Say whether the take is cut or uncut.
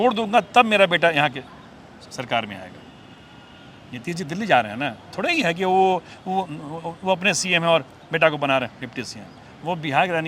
uncut